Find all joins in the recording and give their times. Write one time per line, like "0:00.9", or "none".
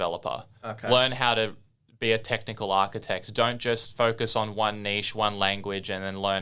none